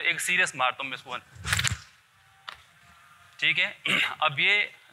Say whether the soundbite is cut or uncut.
uncut